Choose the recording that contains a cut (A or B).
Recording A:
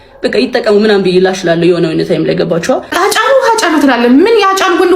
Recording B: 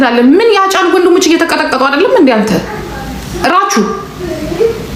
A